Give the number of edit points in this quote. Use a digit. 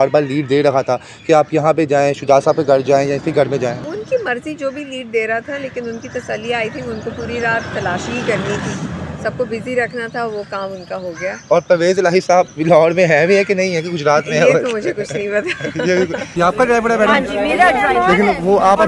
2